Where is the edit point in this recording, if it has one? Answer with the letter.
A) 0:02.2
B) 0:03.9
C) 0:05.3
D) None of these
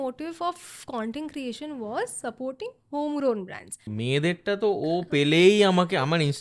B